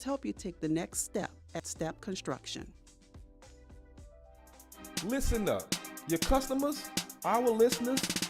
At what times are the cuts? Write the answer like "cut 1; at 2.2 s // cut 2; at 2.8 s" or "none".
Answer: cut 1; at 4.7 s